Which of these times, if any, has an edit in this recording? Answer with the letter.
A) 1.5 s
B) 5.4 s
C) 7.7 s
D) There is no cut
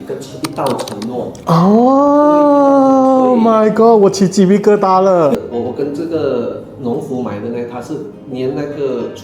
B